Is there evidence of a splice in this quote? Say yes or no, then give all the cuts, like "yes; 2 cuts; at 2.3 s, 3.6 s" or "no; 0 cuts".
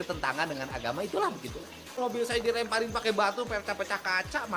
yes; 1 cut; at 1.9 s